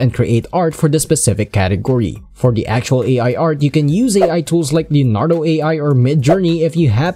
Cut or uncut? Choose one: uncut